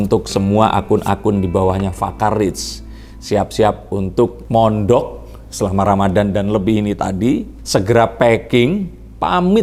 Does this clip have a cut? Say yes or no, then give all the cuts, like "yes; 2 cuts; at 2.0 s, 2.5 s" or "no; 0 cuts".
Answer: no; 0 cuts